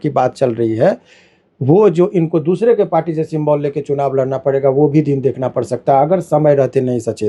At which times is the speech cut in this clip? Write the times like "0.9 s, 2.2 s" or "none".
none